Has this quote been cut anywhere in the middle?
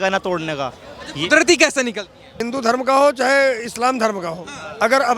yes; 1 cut; at 2.4 s

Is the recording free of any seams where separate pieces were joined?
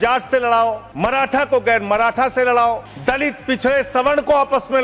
no; 2 cuts; at 0.9 s, 2.9 s

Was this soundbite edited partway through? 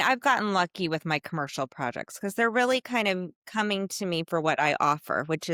no; 0 cuts

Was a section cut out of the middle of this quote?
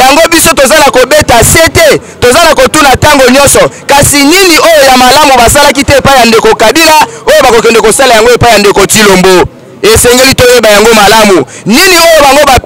no; 0 cuts

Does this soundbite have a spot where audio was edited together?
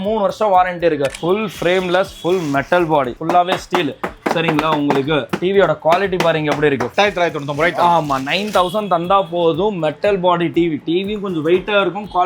yes; 4 cuts; at 1.2 s, 3.2 s, 5.3 s, 6.9 s

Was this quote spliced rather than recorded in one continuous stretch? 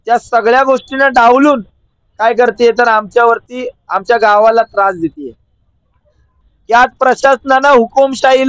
yes; 1 cut; at 6.4 s

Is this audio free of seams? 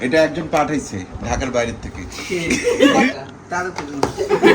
no; 1 cut; at 3.1 s

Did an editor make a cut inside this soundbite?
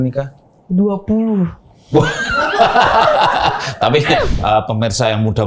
yes; 1 cut; at 4.3 s

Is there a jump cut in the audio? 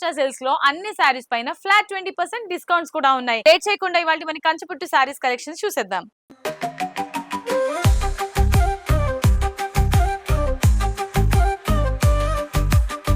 yes; 1 cut; at 3.4 s

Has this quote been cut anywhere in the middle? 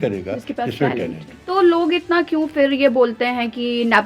yes; 1 cut; at 1.3 s

